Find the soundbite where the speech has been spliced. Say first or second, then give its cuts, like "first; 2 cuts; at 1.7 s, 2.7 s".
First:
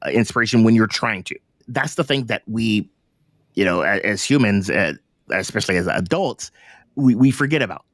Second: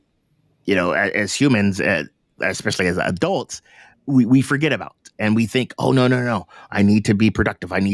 first; 1 cut; at 1.6 s